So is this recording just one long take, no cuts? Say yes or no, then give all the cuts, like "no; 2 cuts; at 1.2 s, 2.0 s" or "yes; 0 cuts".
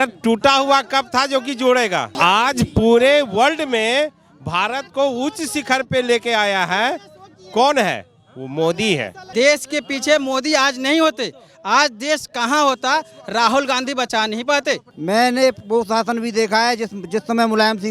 no; 3 cuts; at 2.1 s, 9.2 s, 14.9 s